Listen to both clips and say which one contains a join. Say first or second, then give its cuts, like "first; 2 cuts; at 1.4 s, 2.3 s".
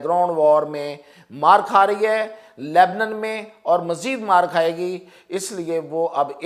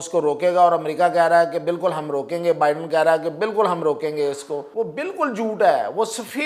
second; 1 cut; at 4.7 s